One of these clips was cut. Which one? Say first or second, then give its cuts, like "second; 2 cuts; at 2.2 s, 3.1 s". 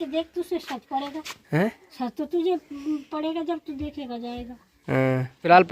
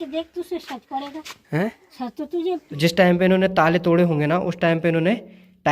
second; 1 cut; at 2.7 s